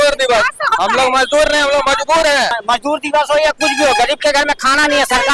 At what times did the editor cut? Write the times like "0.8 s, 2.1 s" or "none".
2.6 s